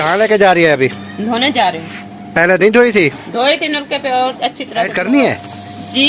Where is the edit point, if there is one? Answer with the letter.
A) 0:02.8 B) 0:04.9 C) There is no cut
B